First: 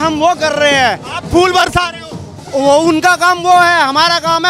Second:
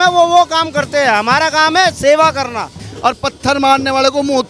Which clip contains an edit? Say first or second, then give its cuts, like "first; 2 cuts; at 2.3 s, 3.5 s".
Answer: second; 1 cut; at 2.8 s